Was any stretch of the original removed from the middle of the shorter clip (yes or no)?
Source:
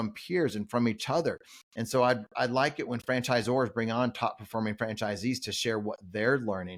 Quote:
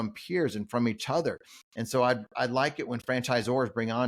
no